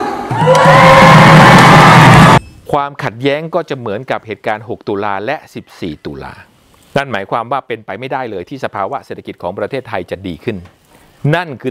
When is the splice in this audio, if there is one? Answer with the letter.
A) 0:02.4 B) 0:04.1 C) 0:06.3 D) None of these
A